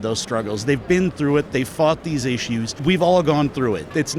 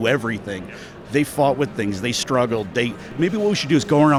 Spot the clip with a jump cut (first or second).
first